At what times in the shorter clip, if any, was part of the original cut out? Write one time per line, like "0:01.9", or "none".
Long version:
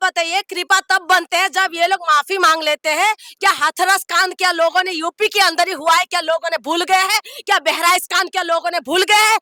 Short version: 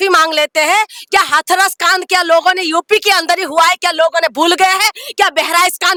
none